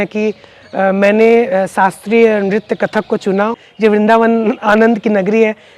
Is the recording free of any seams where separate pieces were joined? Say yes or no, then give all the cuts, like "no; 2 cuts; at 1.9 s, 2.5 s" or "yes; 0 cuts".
no; 1 cut; at 3.5 s